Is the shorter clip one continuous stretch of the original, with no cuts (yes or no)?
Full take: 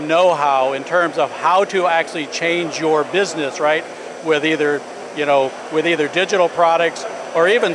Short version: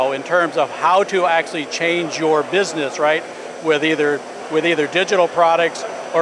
no